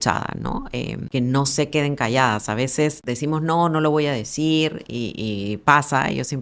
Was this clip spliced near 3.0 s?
yes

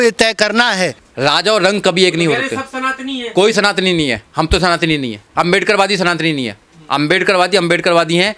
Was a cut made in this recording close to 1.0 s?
yes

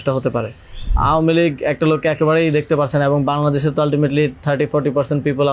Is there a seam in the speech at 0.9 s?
yes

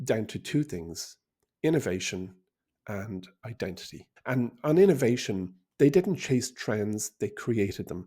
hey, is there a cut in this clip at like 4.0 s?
yes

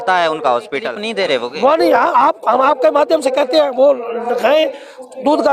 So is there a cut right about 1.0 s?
yes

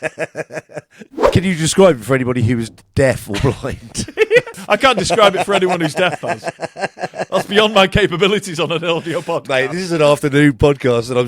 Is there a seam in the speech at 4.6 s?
yes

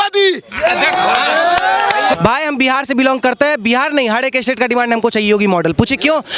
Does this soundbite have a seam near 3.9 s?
no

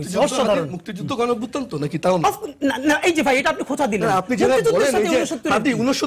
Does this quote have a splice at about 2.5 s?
no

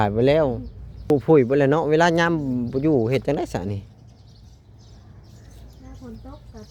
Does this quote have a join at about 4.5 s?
no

